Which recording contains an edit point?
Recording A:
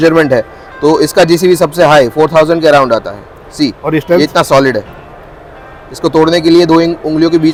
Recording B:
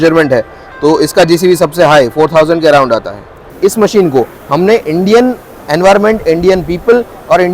B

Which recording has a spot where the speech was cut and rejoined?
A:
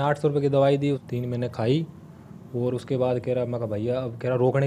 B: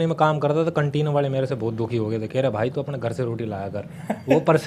A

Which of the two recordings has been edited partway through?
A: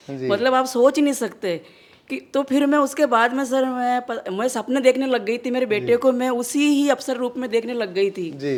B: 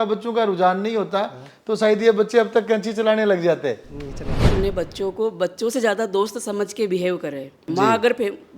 B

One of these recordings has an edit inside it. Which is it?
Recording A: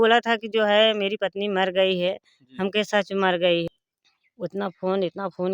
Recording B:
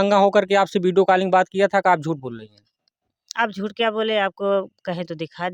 A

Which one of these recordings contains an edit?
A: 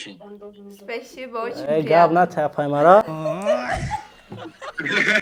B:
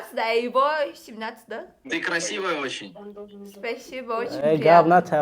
B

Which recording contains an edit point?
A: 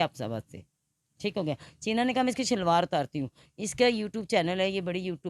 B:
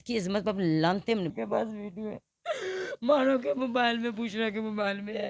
B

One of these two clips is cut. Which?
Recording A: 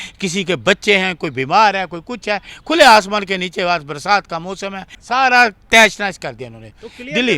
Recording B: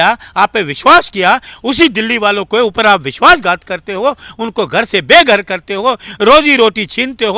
A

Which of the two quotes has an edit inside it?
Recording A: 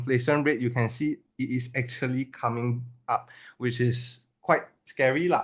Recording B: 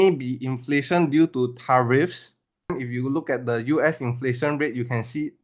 B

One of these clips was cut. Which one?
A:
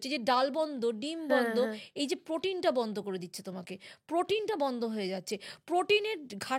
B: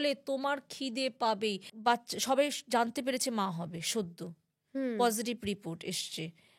B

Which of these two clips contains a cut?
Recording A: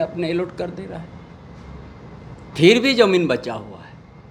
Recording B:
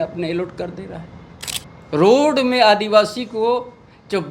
B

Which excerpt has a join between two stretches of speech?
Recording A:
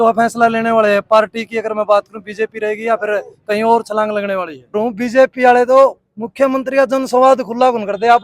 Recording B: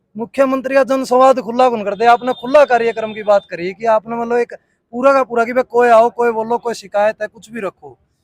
A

